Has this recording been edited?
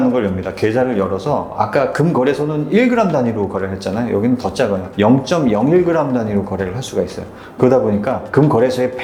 no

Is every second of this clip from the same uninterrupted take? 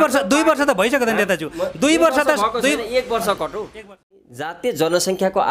no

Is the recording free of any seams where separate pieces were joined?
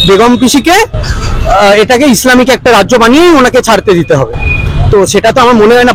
yes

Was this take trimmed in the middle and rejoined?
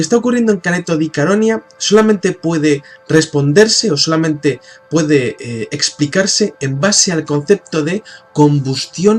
yes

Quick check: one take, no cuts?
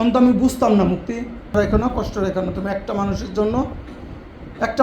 no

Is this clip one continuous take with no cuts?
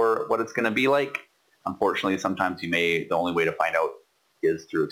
yes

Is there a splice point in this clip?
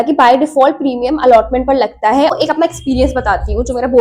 yes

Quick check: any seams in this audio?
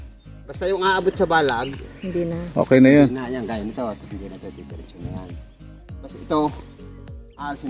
no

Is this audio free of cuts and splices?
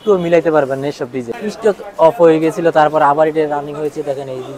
no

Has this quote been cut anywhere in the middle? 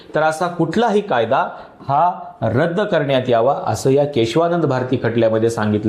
no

